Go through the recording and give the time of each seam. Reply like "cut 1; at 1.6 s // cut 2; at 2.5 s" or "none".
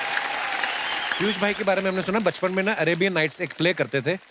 cut 1; at 1.1 s